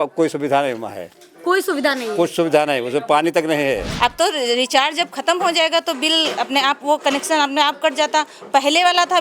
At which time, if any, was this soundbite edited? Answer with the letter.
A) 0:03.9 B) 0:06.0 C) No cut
A